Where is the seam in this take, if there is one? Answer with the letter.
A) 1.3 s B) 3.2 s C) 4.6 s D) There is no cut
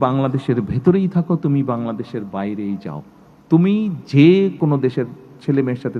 C